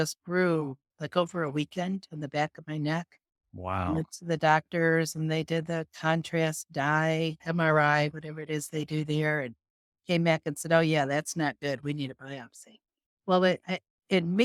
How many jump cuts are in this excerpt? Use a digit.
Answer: 1